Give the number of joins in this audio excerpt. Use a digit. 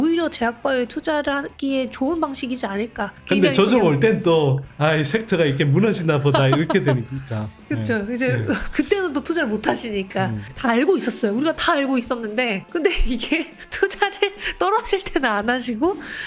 2